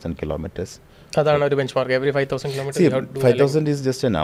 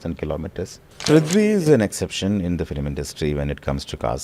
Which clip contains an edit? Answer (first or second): second